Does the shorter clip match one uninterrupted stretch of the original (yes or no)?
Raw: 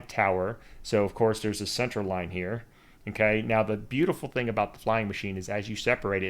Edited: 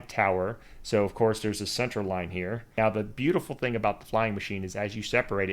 no